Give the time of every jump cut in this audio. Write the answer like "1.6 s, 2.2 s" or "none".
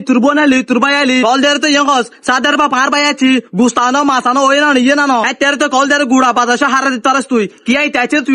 none